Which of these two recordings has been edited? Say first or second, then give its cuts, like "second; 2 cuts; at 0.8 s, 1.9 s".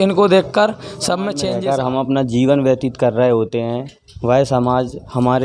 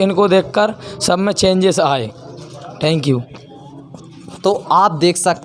first; 1 cut; at 1.4 s